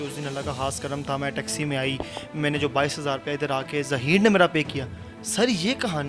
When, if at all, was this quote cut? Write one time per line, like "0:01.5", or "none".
none

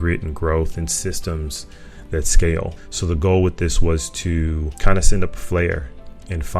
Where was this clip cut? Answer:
0:02.8
0:04.7

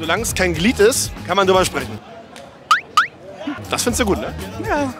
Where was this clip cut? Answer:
none

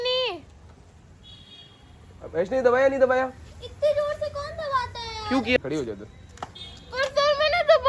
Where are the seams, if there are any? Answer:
0:05.6

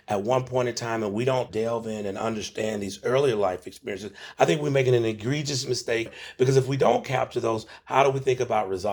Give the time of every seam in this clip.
0:01.5
0:04.2
0:06.1
0:07.7

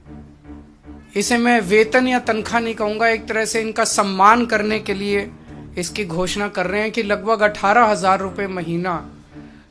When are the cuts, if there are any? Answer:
0:01.1

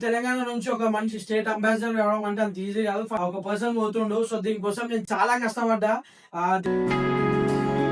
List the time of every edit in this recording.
0:03.1

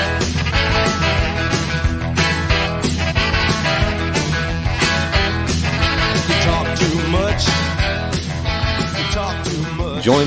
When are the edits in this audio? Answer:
none

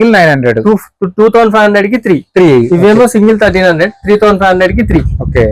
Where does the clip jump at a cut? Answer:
none

